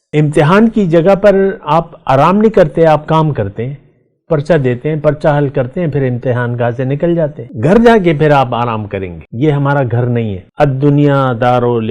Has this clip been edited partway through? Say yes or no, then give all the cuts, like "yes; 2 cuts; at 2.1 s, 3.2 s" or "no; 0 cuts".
yes; 3 cuts; at 7.5 s, 9.2 s, 10.4 s